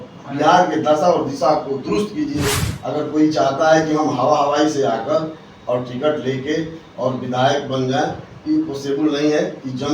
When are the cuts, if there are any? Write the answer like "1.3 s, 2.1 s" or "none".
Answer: 2.6 s